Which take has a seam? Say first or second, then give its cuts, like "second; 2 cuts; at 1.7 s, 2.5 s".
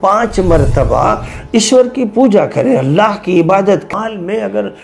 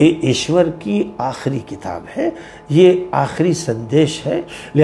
first; 1 cut; at 3.9 s